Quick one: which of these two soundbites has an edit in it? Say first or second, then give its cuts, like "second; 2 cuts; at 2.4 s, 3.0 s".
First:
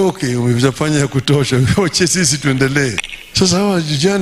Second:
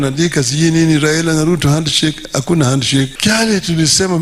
second; 1 cut; at 3.1 s